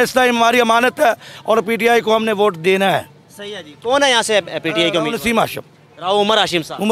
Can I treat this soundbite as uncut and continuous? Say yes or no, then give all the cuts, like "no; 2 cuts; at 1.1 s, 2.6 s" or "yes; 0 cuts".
yes; 0 cuts